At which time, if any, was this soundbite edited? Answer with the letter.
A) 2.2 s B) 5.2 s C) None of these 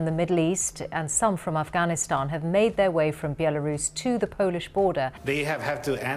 B